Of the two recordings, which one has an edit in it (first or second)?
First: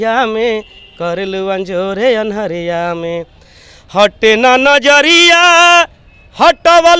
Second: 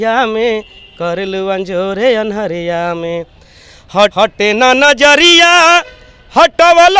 second